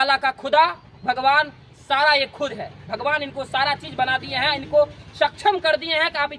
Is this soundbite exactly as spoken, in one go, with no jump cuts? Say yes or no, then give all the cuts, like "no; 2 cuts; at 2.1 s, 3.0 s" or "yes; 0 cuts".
yes; 0 cuts